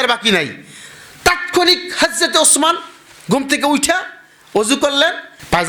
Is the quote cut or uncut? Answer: uncut